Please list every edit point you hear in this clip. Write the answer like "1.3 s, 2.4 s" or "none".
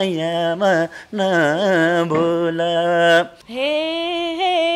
3.4 s